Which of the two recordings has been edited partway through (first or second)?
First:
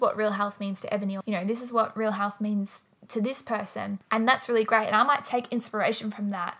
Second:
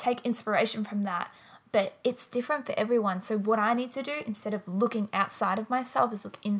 first